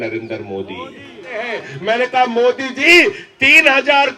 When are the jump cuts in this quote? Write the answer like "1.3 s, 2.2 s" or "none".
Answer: 1.6 s